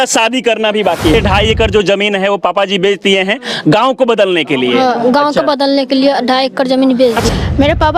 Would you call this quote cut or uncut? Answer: cut